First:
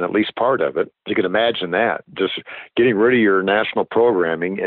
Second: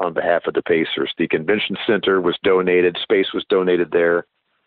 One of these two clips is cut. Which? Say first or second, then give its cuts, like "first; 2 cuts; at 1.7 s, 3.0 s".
first; 1 cut; at 1.0 s